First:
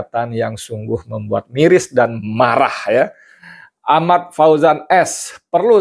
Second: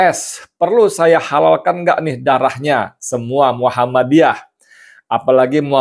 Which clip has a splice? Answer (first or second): first